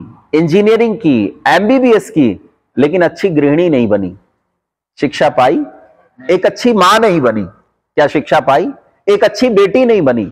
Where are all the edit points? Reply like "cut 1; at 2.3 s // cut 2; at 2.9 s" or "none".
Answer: none